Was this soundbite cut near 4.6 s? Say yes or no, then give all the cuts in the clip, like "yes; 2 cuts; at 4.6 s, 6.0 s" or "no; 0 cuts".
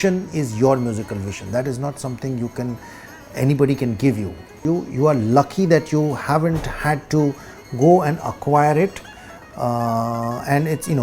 yes; 1 cut; at 4.6 s